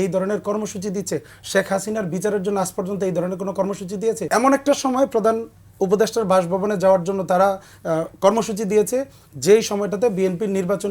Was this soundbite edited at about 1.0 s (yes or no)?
no